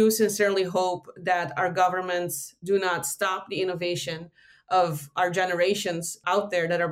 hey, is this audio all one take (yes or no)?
no